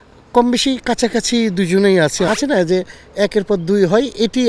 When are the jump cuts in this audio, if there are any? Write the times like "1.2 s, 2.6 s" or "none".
2.3 s